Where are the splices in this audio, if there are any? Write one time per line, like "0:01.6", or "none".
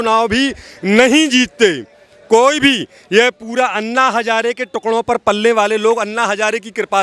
none